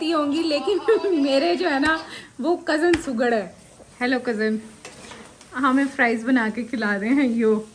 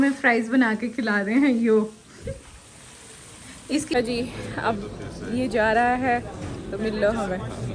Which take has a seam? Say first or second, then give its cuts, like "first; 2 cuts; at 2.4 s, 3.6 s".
second; 1 cut; at 3.9 s